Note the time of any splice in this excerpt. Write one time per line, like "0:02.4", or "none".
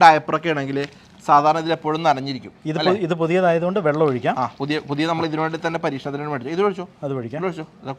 none